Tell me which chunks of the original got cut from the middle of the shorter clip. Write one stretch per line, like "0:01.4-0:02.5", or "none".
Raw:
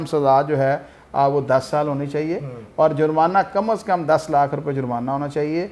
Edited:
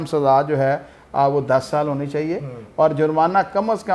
none

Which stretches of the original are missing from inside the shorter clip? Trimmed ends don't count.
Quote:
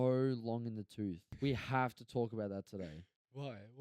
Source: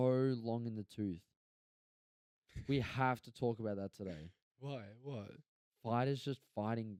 0:01.3-0:02.5

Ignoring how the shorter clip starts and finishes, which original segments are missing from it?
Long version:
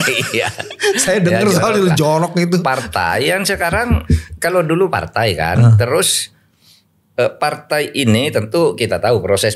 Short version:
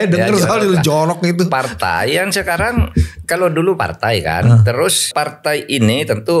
0:06.2-0:07.4

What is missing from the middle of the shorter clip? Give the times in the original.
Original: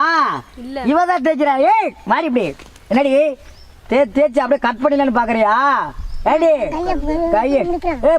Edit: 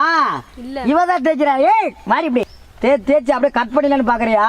0:02.6-0:03.7

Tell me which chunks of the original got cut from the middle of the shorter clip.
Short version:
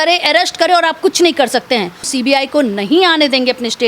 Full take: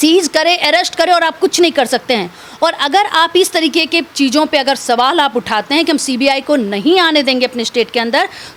0:02.5-0:06.1

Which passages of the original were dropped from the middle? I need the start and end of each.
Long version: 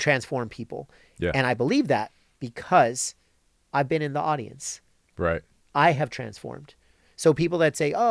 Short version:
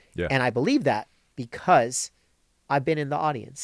none

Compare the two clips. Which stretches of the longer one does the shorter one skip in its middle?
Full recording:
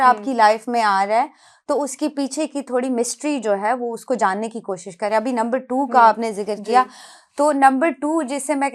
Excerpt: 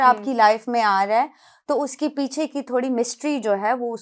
none

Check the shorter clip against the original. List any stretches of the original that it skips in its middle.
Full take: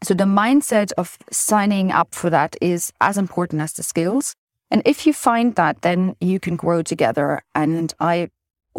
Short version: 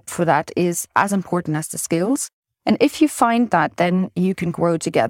none

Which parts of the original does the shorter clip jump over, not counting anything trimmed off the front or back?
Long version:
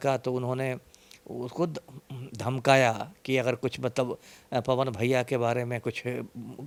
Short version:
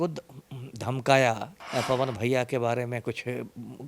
0:03.1-0:04.3

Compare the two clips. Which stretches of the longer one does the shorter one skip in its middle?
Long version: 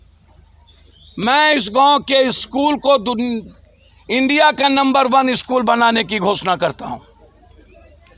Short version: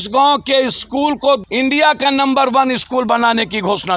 0:03.1-0:04.0

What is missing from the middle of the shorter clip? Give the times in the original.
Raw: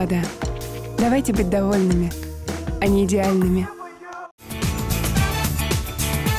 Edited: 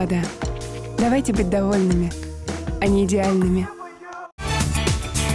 0:04.4-0:05.3

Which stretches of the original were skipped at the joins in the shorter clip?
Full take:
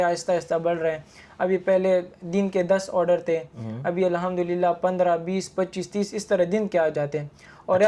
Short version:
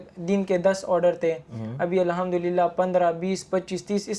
none

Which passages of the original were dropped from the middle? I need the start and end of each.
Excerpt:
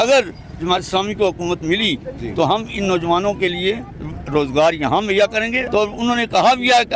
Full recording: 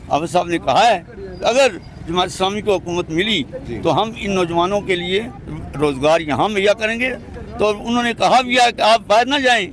0:07.1-0:07.5

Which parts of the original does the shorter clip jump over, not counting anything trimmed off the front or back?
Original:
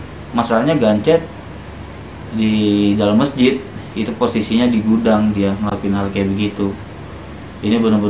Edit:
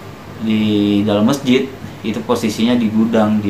none

